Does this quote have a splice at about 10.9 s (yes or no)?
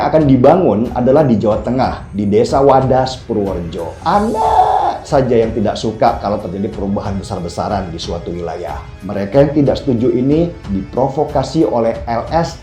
no